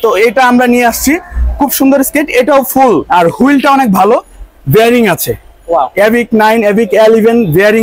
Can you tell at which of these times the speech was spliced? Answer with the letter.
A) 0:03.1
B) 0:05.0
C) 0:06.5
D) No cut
A